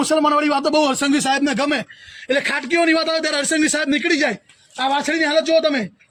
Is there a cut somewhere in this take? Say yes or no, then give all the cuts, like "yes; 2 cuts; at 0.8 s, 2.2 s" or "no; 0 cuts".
no; 0 cuts